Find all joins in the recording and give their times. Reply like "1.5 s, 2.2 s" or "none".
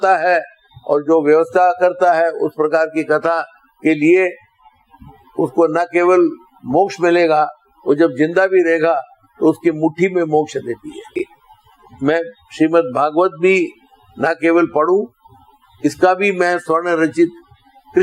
11.2 s